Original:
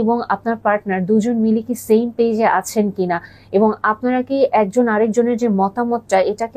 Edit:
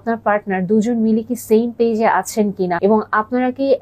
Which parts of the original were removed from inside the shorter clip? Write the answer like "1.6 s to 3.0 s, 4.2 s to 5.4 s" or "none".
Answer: 3.1 s to 3.5 s